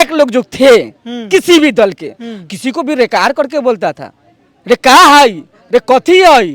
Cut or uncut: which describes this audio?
uncut